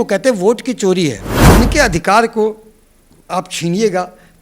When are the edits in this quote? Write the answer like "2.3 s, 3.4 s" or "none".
1.3 s